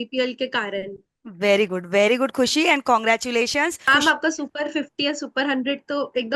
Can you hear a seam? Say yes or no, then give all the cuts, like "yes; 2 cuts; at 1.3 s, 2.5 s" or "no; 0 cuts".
yes; 1 cut; at 3.9 s